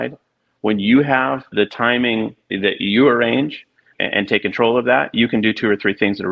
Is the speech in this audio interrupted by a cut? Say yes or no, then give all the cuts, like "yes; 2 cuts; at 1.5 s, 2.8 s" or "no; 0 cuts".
yes; 2 cuts; at 2.0 s, 3.9 s